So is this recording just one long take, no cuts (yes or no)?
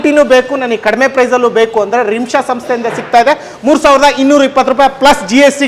yes